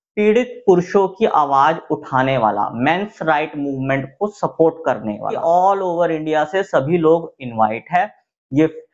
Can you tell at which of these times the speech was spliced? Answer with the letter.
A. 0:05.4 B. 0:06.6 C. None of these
A